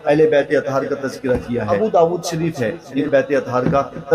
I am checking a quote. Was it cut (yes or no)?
yes